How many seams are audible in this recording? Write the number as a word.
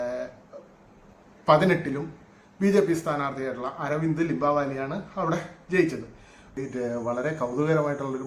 one